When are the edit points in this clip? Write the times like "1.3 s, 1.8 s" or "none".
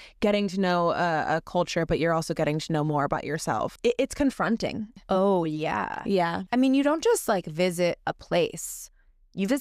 3.7 s, 4.9 s, 6.4 s